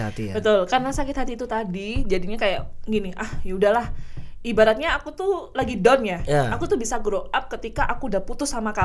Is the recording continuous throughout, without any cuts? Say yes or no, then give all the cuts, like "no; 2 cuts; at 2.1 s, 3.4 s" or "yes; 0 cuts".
yes; 0 cuts